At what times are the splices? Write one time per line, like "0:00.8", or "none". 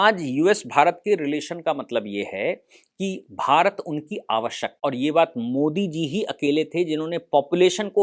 0:04.7